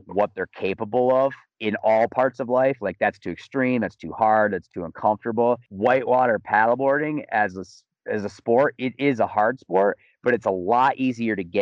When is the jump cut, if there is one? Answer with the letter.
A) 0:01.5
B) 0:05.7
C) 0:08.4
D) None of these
B